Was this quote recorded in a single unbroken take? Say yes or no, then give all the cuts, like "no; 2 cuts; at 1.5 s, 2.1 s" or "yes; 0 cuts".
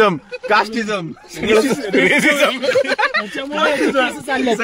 yes; 0 cuts